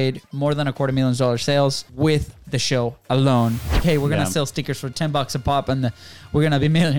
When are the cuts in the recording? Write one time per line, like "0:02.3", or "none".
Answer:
0:01.9
0:03.8